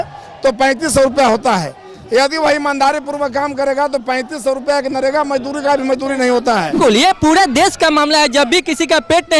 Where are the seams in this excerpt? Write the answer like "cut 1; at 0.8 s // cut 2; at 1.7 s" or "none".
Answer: cut 1; at 6.7 s